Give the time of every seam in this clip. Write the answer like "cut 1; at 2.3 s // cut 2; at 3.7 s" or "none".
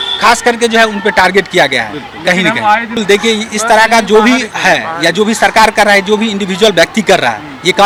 none